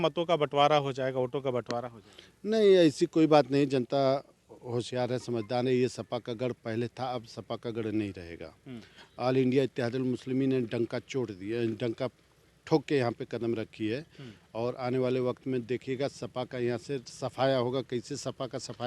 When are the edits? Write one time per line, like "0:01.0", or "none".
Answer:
none